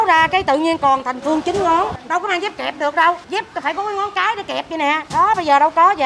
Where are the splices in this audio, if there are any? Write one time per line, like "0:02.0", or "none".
0:02.0
0:03.2